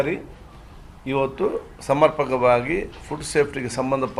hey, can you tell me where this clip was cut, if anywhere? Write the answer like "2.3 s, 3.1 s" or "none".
none

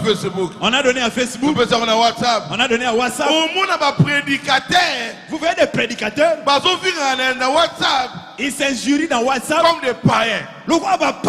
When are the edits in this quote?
none

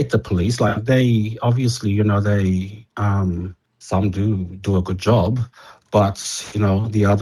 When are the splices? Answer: none

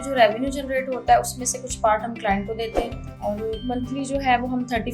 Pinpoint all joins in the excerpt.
3.1 s

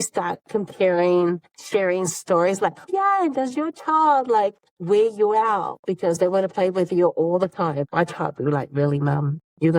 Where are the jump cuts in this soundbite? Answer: 1.5 s, 2.9 s, 4.7 s

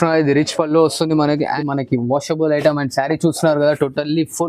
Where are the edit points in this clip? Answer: 1.5 s

